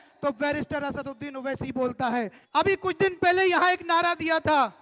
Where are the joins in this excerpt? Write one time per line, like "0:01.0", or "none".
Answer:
0:02.4

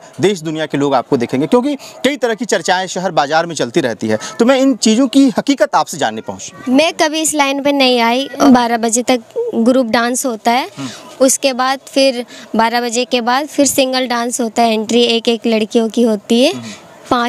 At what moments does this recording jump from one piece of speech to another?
0:08.4

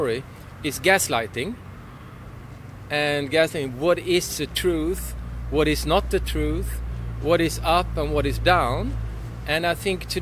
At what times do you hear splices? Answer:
none

